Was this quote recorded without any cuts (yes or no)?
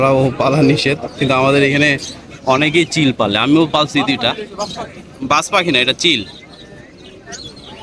yes